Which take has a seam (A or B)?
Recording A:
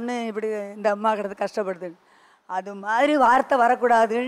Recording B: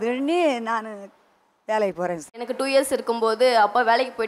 B